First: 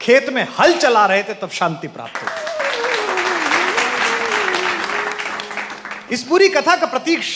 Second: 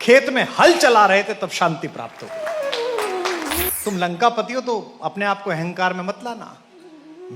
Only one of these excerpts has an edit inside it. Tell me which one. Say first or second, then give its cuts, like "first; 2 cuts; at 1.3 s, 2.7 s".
second; 1 cut; at 3.6 s